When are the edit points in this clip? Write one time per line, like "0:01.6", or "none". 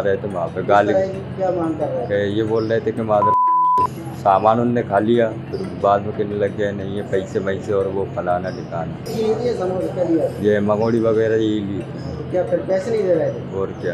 0:09.1

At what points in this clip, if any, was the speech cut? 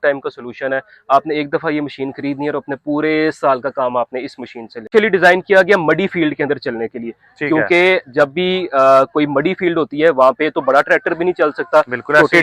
0:04.9

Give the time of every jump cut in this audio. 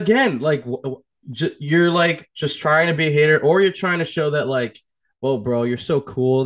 none

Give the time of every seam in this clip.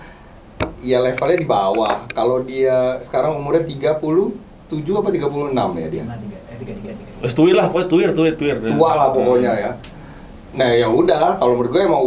none

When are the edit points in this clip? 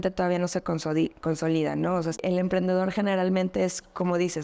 0:02.2

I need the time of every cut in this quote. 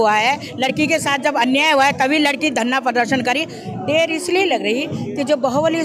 0:03.6

